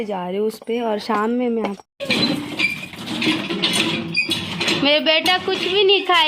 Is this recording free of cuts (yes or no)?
no